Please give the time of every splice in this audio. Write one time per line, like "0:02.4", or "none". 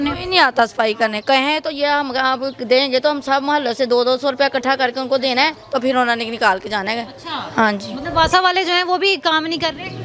none